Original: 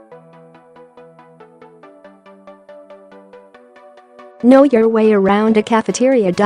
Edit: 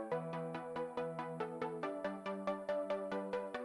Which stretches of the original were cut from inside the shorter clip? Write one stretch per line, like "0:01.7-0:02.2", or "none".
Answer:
none